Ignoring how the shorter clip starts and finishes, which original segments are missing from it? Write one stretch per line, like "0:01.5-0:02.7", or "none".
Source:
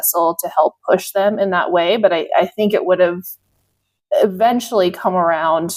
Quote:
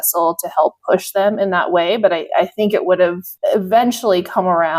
0:03.3-0:04.0